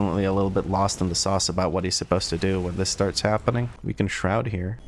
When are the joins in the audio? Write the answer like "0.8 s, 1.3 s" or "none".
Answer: 3.7 s

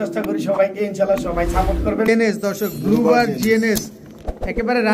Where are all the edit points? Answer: 2.1 s

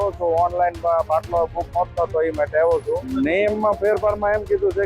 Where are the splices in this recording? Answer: 3.1 s

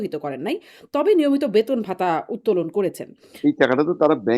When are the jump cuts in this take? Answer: 3.2 s

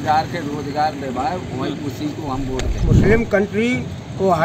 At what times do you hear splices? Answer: 2.8 s

